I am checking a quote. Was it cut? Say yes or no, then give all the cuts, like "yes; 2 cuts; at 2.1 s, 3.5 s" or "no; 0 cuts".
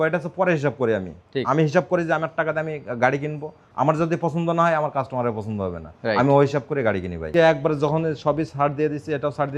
yes; 1 cut; at 7.3 s